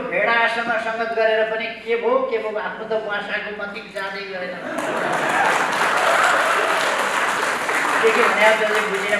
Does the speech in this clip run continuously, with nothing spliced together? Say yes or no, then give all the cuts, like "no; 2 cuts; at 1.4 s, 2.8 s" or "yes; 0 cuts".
yes; 0 cuts